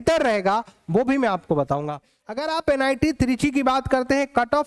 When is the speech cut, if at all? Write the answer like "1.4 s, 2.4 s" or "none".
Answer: 2.1 s